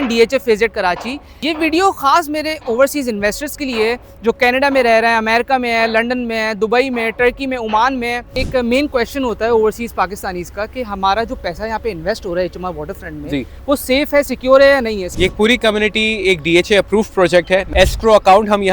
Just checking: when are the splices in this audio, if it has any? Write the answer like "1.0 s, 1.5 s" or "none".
1.4 s, 8.3 s, 15.1 s, 17.7 s